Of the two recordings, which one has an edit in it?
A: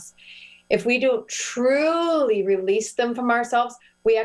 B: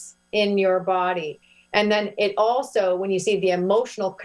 B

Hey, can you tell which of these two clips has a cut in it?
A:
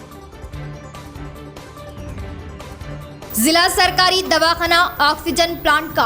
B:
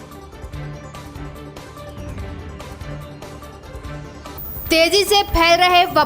A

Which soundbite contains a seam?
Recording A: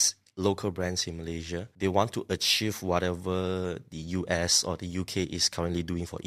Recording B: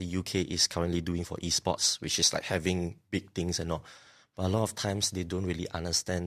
A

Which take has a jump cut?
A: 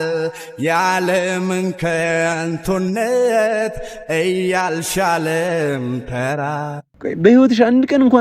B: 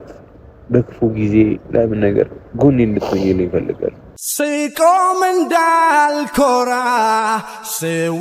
A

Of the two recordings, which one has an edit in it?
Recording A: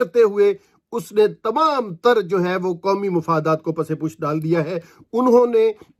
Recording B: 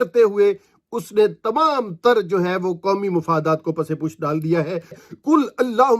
B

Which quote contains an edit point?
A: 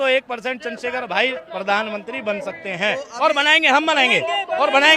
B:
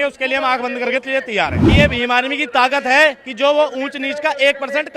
B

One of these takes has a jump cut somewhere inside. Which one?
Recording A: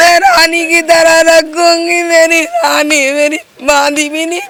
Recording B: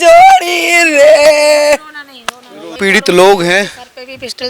B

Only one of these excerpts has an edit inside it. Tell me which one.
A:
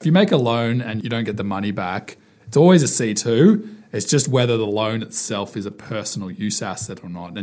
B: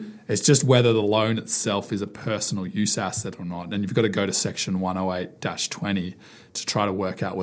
A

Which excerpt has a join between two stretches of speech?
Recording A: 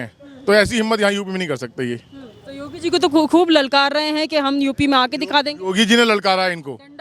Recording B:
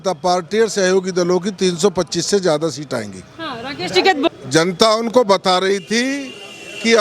B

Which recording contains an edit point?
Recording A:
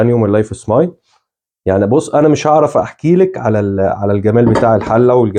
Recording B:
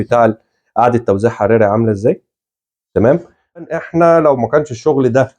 B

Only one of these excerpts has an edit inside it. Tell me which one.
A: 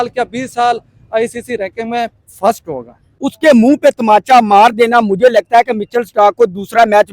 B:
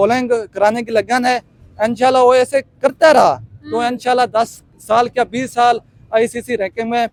A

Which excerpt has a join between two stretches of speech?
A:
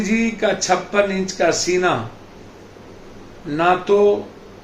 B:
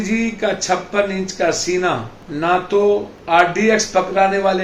B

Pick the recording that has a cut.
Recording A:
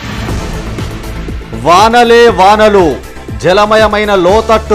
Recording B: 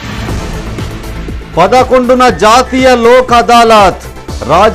A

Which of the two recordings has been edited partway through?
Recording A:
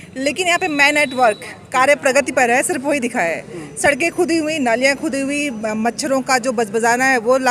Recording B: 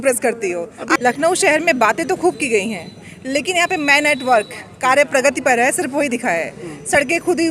B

